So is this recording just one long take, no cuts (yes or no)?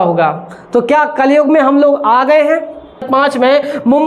no